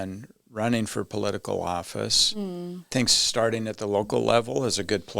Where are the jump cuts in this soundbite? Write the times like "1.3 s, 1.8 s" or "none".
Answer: 2.9 s